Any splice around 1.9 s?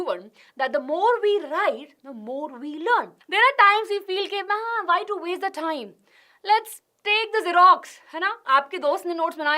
no; 1 cut; at 3.2 s

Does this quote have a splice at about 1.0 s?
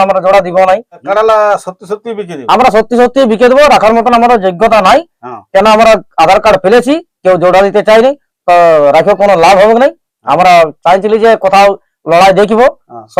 yes; 1 cut; at 1.0 s

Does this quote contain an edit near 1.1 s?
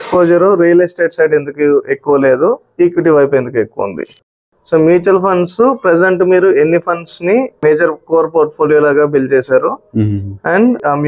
no; 2 cuts; at 4.3 s, 7.6 s

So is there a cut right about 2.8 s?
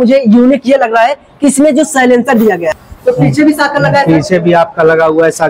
yes; 1 cut; at 2.8 s

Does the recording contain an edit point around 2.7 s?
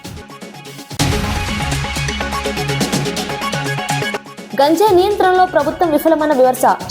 no; 1 cut; at 0.9 s

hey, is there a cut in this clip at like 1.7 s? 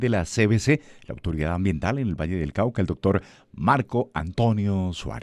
no; 0 cuts

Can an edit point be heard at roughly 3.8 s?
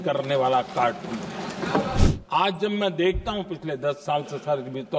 no; 1 cut; at 2.0 s

